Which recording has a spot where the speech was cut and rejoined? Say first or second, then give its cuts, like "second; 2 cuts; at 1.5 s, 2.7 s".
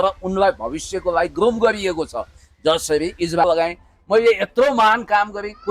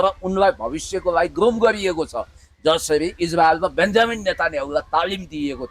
first; 1 cut; at 3.4 s